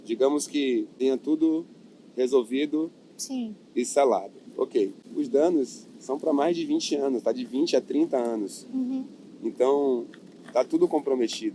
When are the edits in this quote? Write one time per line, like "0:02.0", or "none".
0:00.9
0:05.0